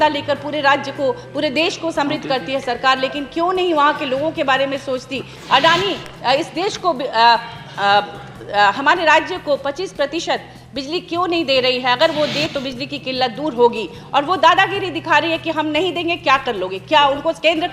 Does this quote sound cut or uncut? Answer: cut